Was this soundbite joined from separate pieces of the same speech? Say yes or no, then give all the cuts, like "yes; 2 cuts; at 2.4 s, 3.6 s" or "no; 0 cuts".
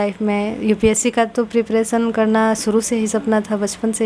no; 0 cuts